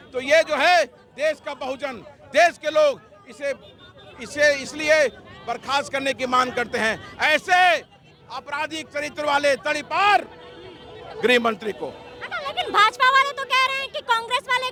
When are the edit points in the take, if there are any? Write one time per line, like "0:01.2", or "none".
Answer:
none